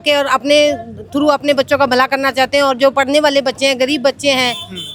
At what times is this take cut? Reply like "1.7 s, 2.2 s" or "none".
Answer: none